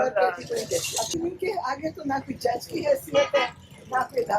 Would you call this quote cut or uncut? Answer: cut